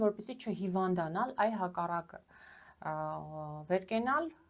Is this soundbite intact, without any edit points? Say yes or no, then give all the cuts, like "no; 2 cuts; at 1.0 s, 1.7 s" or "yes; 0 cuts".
yes; 0 cuts